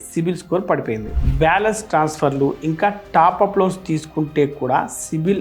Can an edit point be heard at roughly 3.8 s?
no; 1 cut; at 1.1 s

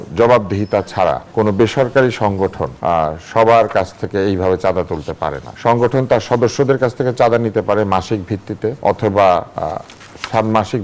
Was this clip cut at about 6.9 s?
no; 5 cuts; at 1.2 s, 2.7 s, 5.5 s, 8.8 s, 9.5 s

